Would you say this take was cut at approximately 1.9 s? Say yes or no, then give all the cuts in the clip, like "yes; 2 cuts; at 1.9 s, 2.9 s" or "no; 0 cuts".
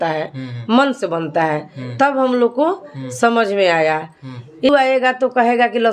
no; 1 cut; at 4.7 s